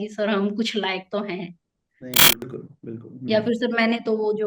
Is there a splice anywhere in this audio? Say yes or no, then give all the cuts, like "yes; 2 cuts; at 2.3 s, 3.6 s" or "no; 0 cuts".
yes; 1 cut; at 2.5 s